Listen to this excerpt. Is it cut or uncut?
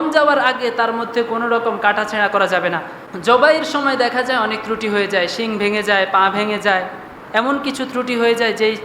cut